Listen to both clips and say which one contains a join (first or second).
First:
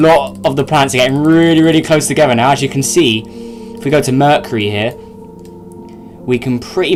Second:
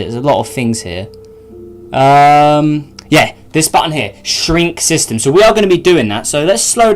second